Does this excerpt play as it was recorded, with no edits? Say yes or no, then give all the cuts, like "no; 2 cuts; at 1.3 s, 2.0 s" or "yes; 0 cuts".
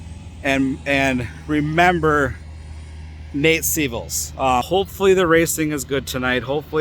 no; 1 cut; at 4.7 s